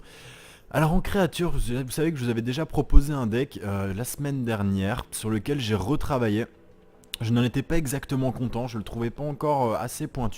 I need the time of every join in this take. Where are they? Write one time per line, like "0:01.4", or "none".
0:05.7

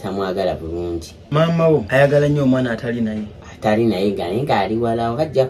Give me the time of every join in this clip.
0:01.1
0:01.9

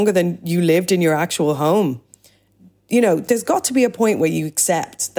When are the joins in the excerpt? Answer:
0:03.2

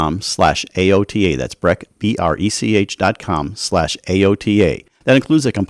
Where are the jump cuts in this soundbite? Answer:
none

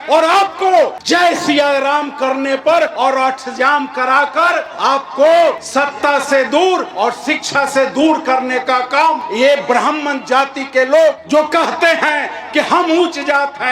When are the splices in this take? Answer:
0:01.0
0:02.9
0:04.7
0:05.6
0:06.9
0:09.2
0:11.2

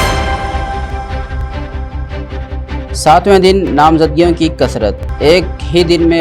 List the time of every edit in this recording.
0:01.1

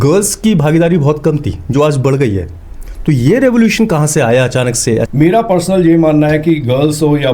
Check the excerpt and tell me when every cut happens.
0:05.1

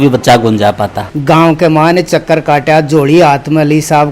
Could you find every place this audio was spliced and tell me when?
0:01.0

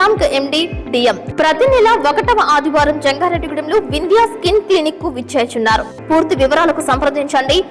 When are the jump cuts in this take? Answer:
0:01.3
0:05.9

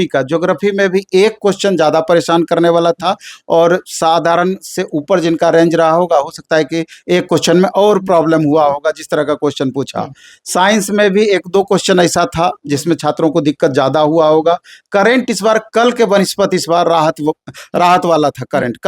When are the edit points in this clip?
none

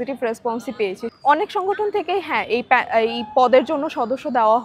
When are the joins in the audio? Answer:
0:01.0

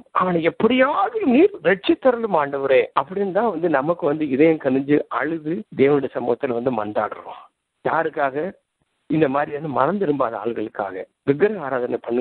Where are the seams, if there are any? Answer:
0:02.9
0:05.6

